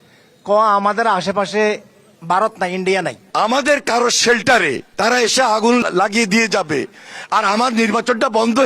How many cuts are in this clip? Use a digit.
3